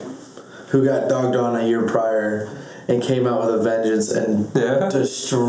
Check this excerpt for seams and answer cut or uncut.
uncut